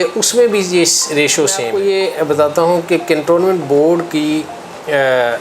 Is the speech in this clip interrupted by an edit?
yes; 1 cut; at 1.6 s

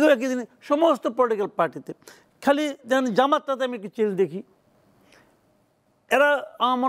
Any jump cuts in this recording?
no; 0 cuts

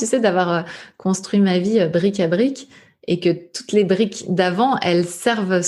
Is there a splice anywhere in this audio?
no; 0 cuts

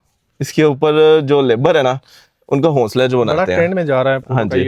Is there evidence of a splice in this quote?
no; 0 cuts

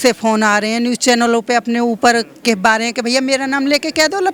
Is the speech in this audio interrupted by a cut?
no; 0 cuts

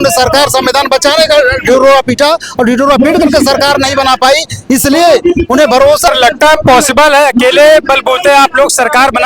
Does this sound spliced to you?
yes; 1 cut; at 6.1 s

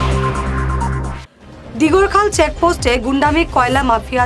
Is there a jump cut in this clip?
yes; 1 cut; at 1.1 s

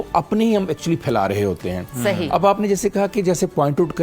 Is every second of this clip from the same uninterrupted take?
yes; 0 cuts

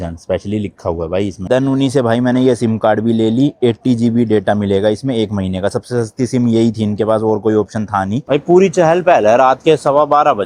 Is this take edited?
yes; 2 cuts; at 1.4 s, 8.3 s

